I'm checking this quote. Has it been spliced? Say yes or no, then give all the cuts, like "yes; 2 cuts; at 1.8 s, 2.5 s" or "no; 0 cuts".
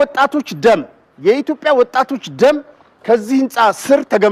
no; 0 cuts